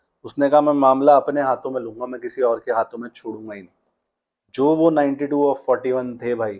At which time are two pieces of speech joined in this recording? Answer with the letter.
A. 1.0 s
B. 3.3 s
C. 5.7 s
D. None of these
D